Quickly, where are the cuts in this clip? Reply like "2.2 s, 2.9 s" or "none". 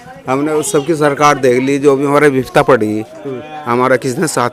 none